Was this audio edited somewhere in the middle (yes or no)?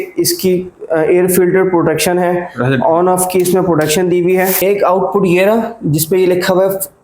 yes